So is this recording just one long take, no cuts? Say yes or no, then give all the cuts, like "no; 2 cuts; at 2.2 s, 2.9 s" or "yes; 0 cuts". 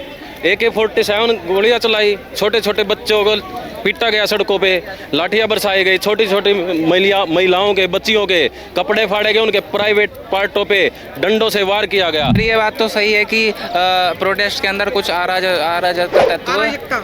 no; 2 cuts; at 12.4 s, 16.3 s